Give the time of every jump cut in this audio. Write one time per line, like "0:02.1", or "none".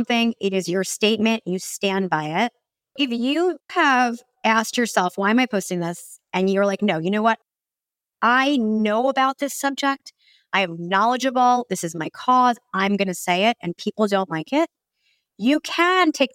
0:03.0